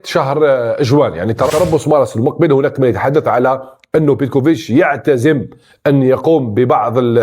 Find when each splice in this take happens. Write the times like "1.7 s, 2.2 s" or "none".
1.5 s